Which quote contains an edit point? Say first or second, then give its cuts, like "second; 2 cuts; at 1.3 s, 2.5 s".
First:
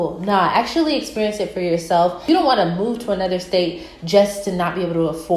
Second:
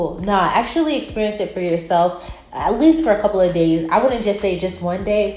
first; 1 cut; at 2.2 s